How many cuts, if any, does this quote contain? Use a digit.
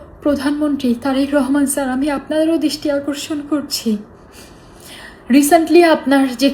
0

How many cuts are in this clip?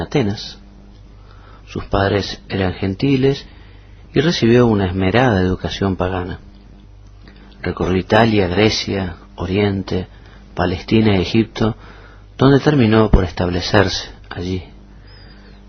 0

